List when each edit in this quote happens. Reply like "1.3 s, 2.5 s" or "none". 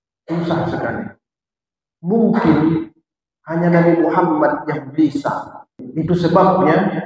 5.8 s